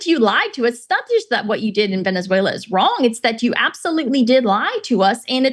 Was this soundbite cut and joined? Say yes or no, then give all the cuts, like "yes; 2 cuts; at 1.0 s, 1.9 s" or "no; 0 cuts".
no; 0 cuts